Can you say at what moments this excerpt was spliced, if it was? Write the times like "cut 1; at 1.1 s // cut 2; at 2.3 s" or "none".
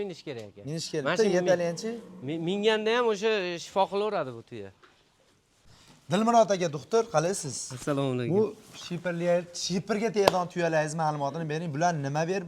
none